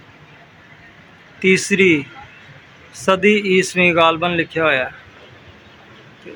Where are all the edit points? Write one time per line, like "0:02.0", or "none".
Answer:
none